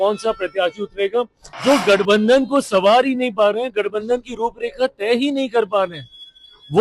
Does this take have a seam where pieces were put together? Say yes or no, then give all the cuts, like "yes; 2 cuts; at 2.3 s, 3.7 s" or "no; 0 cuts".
yes; 1 cut; at 1.4 s